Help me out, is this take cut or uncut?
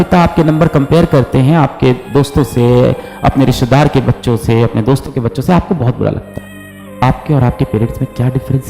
cut